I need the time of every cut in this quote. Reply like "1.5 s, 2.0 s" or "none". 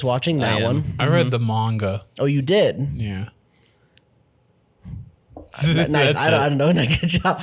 none

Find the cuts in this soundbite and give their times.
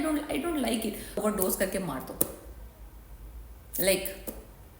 1.2 s

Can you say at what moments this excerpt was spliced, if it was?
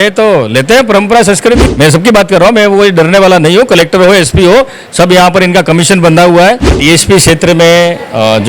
1.6 s, 6.7 s

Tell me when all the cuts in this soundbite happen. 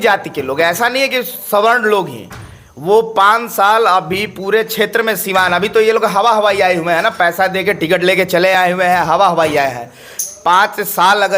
none

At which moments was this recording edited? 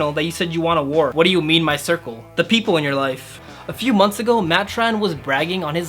1.1 s, 3.4 s

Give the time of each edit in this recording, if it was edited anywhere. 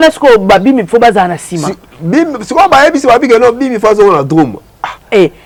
none

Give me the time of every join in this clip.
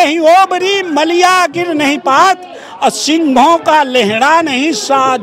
none

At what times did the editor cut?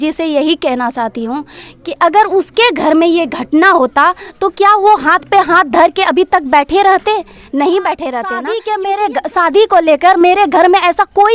8.4 s

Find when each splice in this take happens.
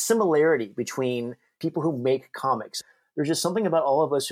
1.6 s, 2.8 s

